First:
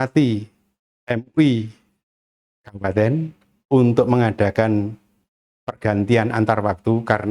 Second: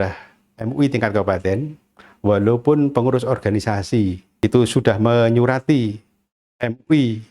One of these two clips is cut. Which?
second; 1 cut; at 4.3 s

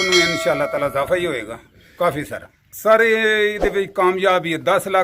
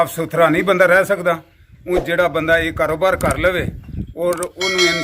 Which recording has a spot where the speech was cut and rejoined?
first; 1 cut; at 2.5 s

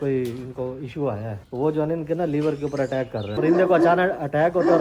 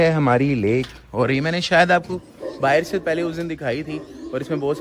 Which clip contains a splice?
first; 2 cuts; at 1.4 s, 3.4 s

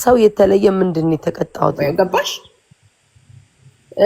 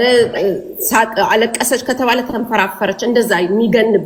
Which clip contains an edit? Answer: first; 1 cut; at 1.8 s

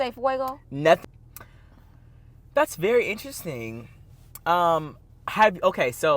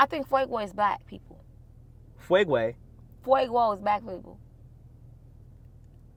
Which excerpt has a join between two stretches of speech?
first; 1 cut; at 1.0 s

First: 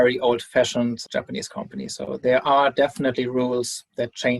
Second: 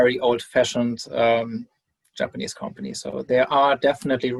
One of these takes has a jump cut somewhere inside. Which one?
first; 1 cut; at 1.0 s

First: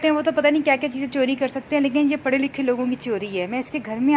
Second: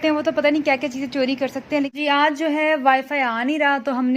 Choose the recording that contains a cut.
second; 1 cut; at 1.9 s

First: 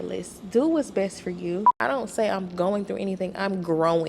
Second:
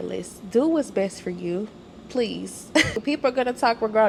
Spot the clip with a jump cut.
first; 1 cut; at 1.7 s

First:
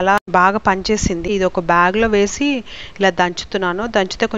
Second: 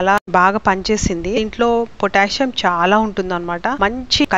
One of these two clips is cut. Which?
first; 1 cut; at 1.3 s

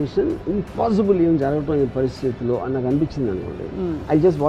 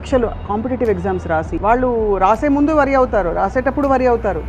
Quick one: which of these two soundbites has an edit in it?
second; 1 cut; at 1.5 s

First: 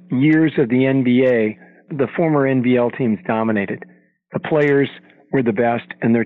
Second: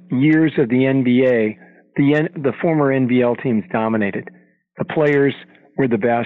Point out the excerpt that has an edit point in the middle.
first; 1 cut; at 1.9 s

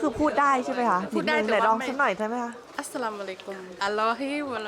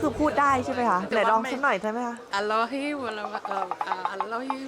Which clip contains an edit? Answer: second; 2 cuts; at 1.1 s, 2.2 s

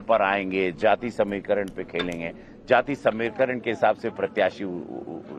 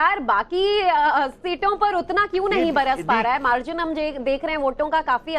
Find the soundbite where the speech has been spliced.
second; 1 cut; at 1.4 s

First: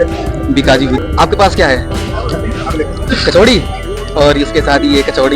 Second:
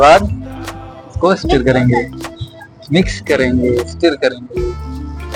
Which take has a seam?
first; 1 cut; at 1.0 s

